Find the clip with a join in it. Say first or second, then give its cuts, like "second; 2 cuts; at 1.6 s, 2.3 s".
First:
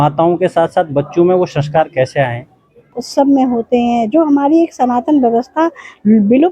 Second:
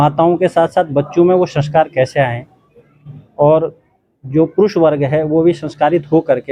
first; 1 cut; at 3.0 s